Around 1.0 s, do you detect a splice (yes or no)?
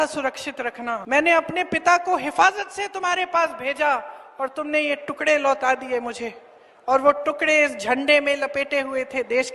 yes